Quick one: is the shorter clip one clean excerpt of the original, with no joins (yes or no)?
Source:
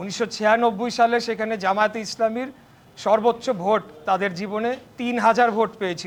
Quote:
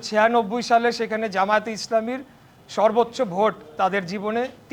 yes